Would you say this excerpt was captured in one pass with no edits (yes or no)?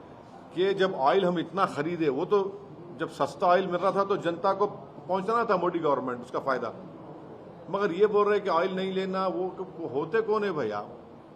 yes